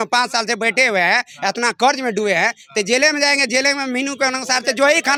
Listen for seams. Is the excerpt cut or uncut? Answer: uncut